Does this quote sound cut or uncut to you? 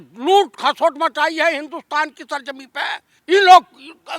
cut